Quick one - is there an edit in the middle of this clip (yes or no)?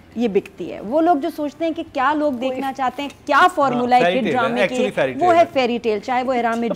no